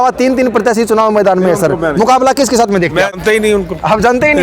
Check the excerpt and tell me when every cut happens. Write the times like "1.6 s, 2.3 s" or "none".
3.2 s